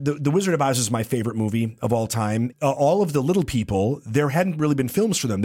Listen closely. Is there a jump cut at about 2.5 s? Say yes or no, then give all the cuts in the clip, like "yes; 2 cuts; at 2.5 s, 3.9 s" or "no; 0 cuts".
yes; 1 cut; at 2.5 s